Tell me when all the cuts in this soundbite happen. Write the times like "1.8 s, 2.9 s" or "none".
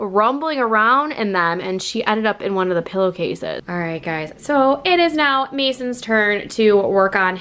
3.6 s